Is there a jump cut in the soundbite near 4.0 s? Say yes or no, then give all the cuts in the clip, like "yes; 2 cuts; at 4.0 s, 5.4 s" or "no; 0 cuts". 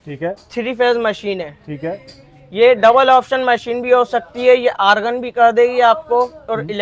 no; 0 cuts